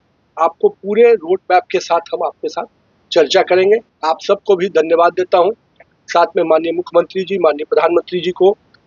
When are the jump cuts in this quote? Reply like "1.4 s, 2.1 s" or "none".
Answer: 3.9 s

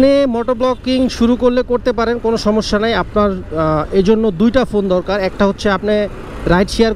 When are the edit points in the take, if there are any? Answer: none

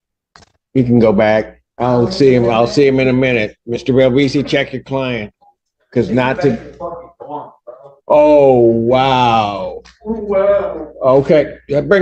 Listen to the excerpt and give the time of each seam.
none

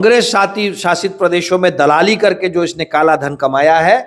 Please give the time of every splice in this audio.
none

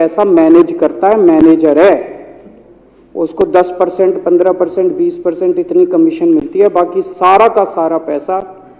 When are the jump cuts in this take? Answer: none

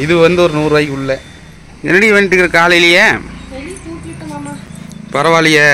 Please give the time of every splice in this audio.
none

